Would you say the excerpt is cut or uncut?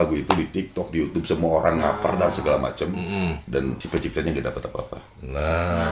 cut